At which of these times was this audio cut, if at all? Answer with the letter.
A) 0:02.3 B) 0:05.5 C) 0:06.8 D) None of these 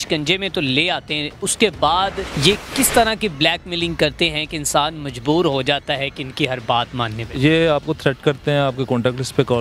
A